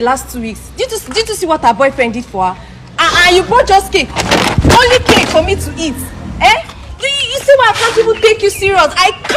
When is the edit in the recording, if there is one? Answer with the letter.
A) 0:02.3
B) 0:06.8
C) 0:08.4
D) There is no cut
B